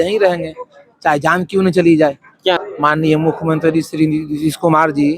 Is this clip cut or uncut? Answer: cut